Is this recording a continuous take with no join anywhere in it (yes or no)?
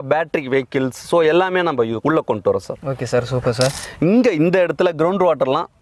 no